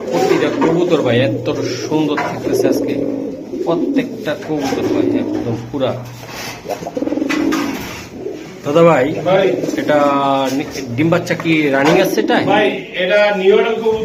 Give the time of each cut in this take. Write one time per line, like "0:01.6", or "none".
none